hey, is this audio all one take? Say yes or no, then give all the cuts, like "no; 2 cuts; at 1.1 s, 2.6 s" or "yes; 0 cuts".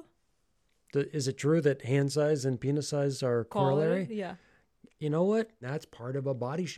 no; 2 cuts; at 3.5 s, 5.6 s